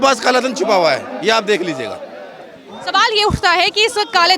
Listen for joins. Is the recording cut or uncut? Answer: uncut